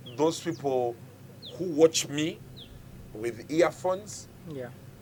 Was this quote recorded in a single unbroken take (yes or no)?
yes